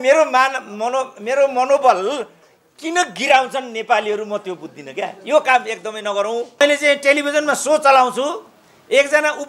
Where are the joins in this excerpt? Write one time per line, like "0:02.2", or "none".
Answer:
0:06.6